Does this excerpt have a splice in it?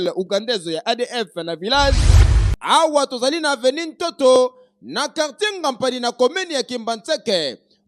yes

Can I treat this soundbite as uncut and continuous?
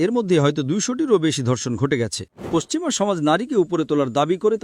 no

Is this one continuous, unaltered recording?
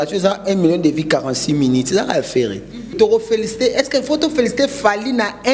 no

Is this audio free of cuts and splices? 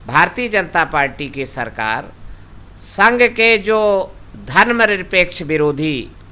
yes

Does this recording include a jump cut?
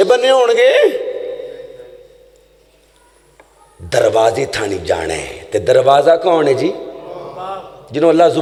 no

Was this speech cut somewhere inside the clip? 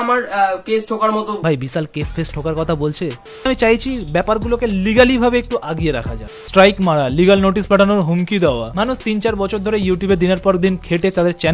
yes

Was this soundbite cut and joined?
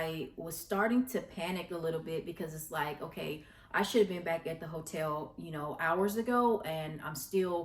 no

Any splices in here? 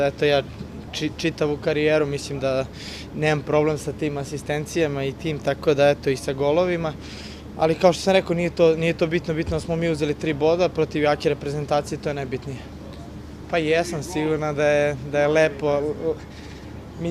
yes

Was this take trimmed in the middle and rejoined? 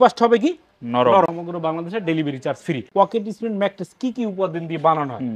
yes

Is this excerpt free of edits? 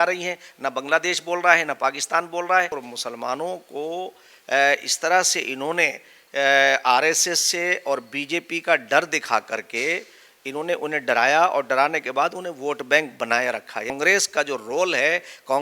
no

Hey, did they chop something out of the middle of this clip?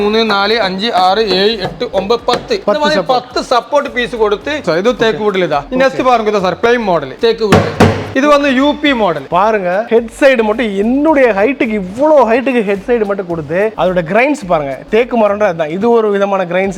yes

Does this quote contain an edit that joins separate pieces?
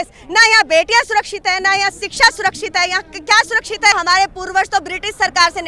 yes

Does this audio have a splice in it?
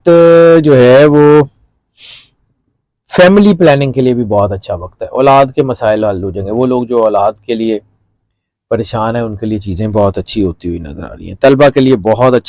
no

